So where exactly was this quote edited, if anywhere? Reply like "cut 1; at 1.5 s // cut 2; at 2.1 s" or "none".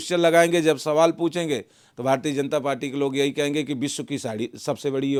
none